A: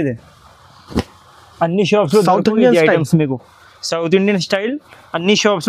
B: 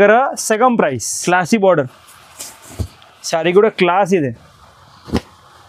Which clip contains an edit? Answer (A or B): B